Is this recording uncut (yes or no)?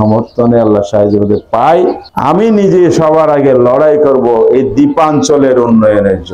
no